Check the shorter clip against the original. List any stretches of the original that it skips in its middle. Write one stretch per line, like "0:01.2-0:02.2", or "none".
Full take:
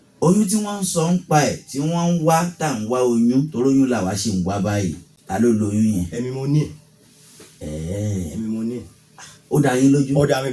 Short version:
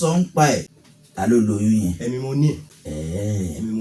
0:01.7-0:04.9
0:06.9-0:07.5